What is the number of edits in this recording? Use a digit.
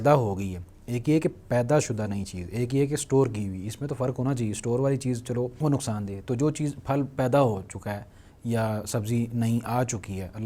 0